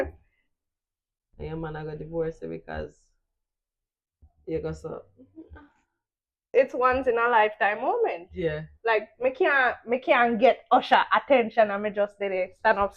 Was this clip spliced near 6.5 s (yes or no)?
yes